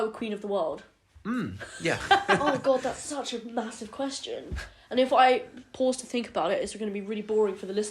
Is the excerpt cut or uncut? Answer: cut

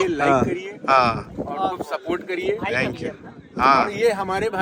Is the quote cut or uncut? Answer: uncut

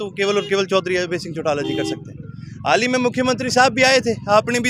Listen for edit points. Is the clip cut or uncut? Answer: uncut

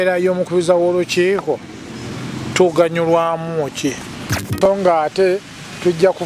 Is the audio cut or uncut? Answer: cut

